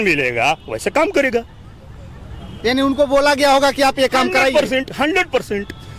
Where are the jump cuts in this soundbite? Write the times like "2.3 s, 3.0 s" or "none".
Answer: none